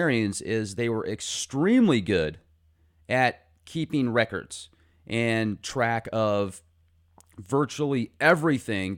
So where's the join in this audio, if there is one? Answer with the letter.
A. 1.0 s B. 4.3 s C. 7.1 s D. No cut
A